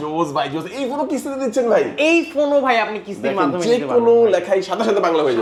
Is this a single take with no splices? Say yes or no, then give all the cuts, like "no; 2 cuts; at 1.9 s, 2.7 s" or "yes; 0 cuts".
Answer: yes; 0 cuts